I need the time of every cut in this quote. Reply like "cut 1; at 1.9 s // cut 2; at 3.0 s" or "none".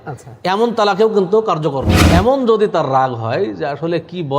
cut 1; at 1.9 s